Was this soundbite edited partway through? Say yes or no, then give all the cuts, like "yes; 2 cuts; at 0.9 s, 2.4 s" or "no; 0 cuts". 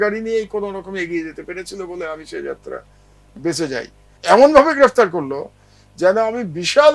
yes; 1 cut; at 4.0 s